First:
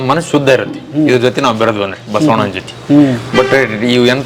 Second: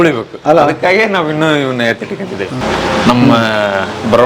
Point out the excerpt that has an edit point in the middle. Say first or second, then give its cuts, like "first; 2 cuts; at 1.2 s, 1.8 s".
second; 1 cut; at 2.6 s